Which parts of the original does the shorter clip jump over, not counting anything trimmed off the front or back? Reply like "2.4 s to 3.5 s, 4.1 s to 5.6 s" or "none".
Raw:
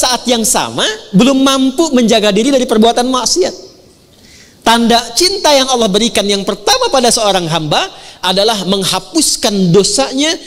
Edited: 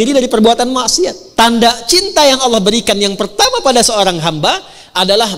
3.6 s to 4.5 s